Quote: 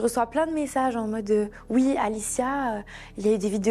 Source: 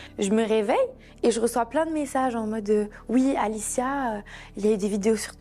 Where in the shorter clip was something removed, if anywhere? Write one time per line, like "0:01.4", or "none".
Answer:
none

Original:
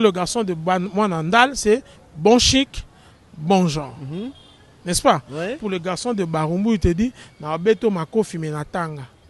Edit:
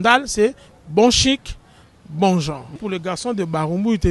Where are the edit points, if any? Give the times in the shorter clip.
0:02.8

